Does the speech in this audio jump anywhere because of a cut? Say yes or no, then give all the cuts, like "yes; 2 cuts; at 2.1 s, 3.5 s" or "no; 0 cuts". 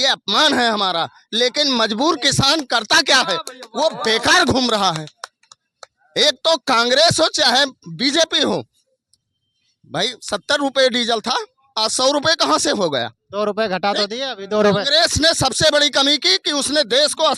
no; 0 cuts